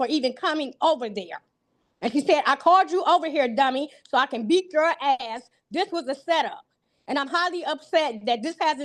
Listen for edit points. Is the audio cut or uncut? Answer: uncut